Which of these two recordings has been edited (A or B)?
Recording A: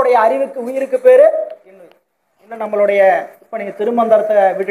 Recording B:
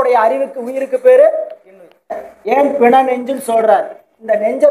B